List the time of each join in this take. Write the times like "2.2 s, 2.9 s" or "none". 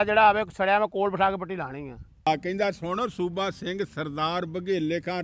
2.3 s